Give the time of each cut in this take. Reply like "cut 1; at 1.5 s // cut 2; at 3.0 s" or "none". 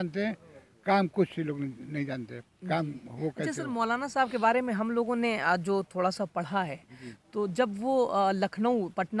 none